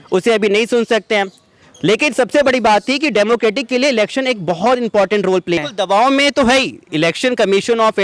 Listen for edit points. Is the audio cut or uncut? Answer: cut